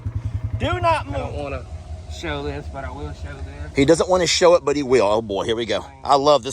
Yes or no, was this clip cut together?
yes